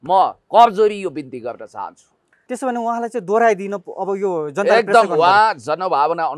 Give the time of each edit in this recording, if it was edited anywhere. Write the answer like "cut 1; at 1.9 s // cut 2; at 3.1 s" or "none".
cut 1; at 2.4 s

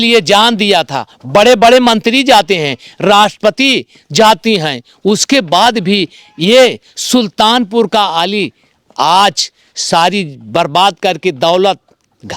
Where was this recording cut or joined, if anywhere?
none

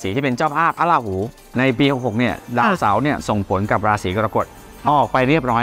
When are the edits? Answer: cut 1; at 1.4 s

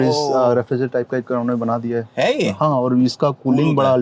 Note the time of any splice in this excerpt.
none

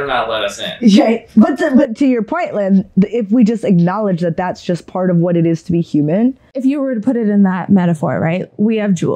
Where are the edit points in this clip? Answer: cut 1; at 6.5 s

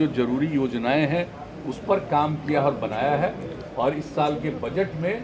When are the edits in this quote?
none

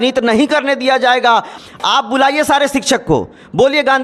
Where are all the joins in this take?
cut 1; at 1.5 s

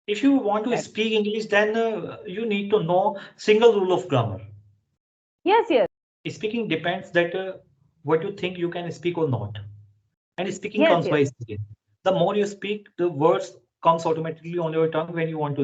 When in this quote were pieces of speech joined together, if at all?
cut 1; at 6.1 s

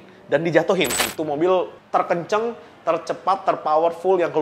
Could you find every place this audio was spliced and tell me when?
cut 1; at 1.1 s

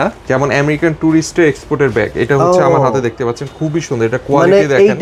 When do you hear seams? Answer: none

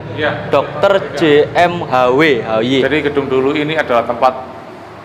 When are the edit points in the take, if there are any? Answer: cut 1; at 2.8 s

